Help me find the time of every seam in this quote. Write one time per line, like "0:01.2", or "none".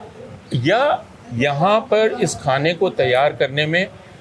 none